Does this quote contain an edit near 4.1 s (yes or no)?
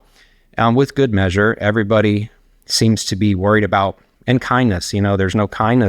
yes